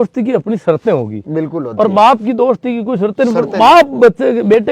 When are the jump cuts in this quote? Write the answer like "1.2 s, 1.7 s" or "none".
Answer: none